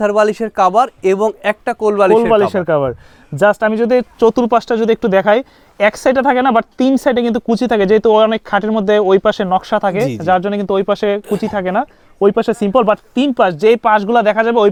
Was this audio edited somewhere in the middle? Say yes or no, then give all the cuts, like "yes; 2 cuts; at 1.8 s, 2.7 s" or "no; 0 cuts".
no; 0 cuts